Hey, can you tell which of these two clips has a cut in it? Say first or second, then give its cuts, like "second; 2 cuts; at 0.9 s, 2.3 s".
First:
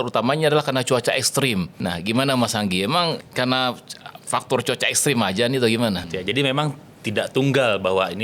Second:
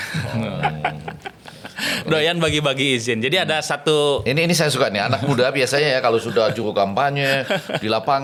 first; 3 cuts; at 1.7 s, 3.3 s, 6.1 s